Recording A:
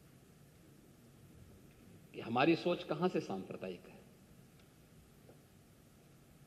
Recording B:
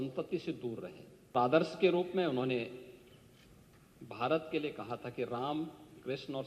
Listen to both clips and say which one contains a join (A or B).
B